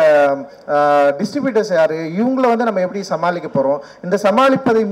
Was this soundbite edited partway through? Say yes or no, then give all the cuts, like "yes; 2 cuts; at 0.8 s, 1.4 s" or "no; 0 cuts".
no; 0 cuts